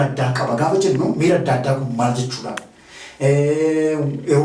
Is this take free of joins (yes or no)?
yes